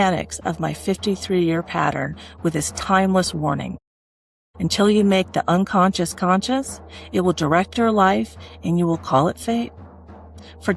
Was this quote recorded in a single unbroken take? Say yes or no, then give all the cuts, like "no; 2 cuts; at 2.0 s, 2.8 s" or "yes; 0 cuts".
yes; 0 cuts